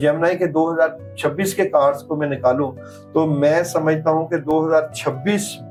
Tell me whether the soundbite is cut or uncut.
uncut